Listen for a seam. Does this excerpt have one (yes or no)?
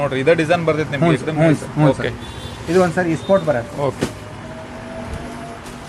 no